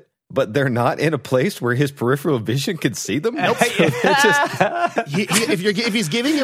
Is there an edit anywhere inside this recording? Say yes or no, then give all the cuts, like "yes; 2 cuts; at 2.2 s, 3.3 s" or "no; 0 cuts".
no; 0 cuts